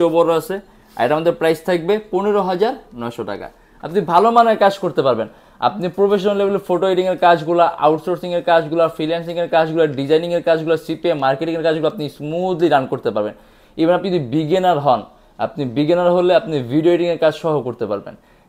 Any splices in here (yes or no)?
no